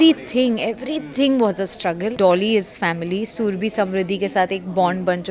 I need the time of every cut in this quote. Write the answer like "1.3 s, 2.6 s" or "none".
2.2 s